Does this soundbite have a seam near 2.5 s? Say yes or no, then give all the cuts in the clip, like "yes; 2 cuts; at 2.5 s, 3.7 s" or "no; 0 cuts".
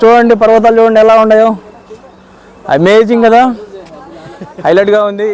no; 0 cuts